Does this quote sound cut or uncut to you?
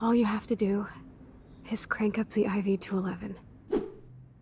cut